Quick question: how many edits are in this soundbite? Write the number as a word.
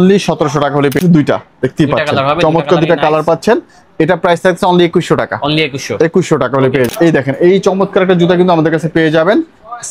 two